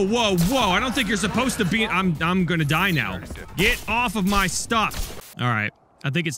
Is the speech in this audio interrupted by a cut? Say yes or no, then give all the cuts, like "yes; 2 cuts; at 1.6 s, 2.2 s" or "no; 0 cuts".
yes; 2 cuts; at 3.4 s, 5.1 s